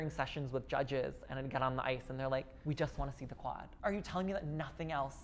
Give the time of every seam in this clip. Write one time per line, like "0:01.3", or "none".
0:02.5
0:03.7